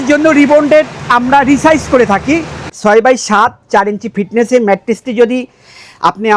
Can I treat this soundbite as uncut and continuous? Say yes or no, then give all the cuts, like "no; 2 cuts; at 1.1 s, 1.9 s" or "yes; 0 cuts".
no; 1 cut; at 2.7 s